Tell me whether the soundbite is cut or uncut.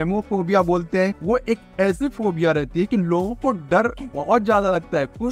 cut